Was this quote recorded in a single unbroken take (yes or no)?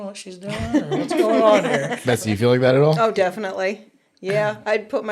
no